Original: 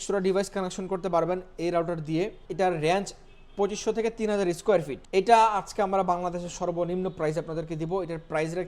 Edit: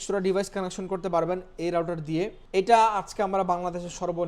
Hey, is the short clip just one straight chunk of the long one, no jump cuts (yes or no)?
no